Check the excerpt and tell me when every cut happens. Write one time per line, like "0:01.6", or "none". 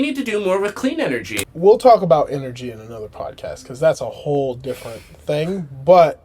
0:01.4